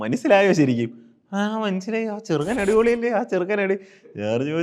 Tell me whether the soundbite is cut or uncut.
uncut